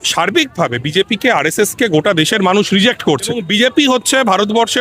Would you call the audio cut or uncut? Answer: cut